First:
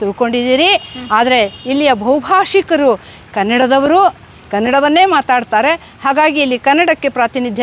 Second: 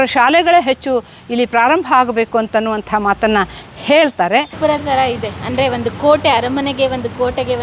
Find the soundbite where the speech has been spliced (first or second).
second